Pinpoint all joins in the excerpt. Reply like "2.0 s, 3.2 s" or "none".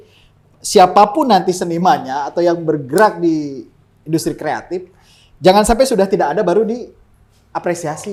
none